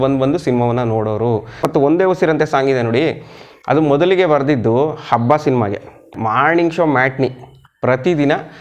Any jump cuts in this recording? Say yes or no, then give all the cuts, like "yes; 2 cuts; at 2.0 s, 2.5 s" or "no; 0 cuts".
yes; 2 cuts; at 1.6 s, 6.1 s